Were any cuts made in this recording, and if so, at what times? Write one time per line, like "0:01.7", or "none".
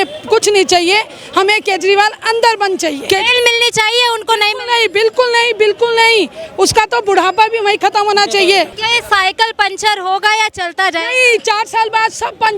0:03.1
0:08.8